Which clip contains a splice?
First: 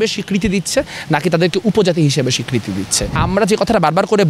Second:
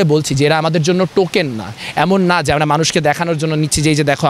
first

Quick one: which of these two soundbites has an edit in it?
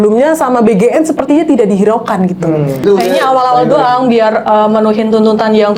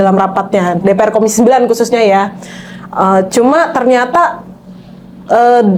first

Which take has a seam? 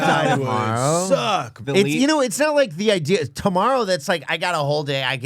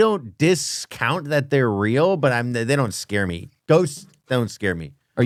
first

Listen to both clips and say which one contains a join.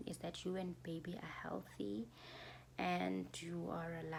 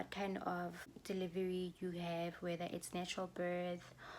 second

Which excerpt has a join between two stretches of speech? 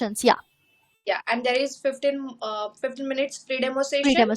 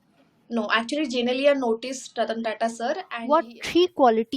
second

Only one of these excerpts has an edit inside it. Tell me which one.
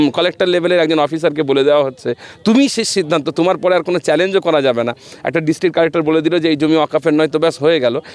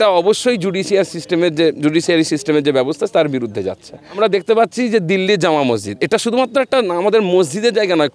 second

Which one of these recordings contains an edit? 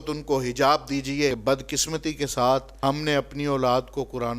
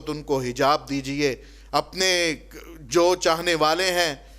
first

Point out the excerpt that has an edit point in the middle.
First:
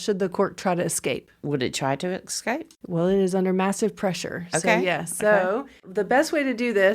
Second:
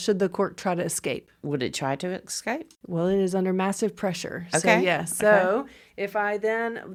first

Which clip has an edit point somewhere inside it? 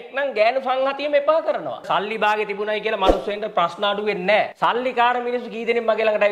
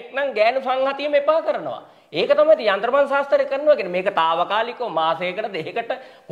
first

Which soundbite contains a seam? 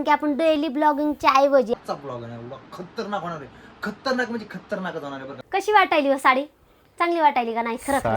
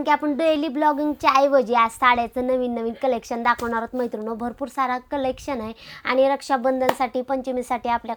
first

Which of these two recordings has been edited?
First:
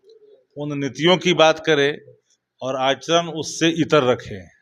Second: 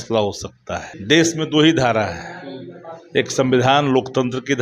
second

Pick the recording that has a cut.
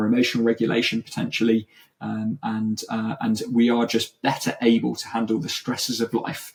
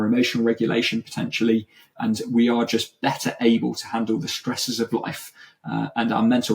second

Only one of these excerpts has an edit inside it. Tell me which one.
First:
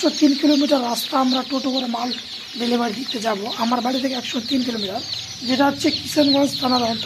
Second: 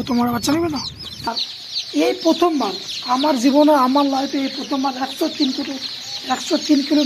second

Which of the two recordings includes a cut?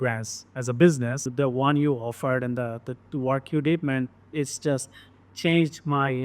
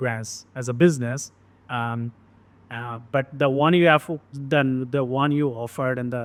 first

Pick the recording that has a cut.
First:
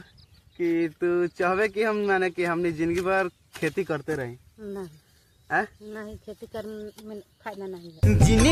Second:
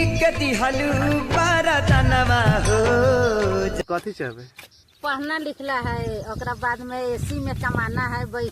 second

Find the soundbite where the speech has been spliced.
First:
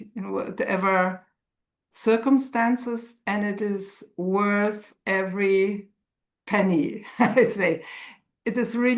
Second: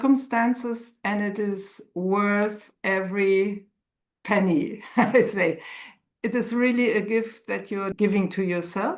second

